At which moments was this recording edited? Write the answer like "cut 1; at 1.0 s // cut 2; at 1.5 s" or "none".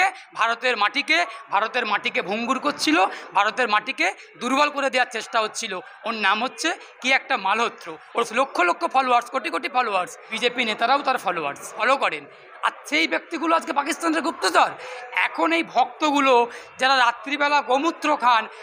cut 1; at 8.3 s // cut 2; at 10.2 s // cut 3; at 11.8 s